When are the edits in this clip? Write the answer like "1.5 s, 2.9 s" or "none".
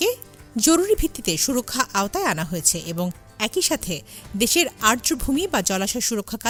none